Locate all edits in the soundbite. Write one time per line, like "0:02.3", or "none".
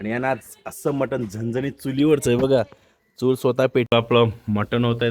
0:03.9